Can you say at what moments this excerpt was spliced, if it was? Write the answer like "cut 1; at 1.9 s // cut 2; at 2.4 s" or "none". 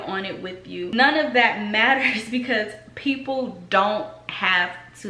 cut 1; at 0.9 s